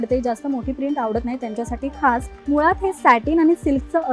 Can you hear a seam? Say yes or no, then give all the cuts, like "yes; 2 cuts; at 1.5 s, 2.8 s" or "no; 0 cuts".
yes; 1 cut; at 2.3 s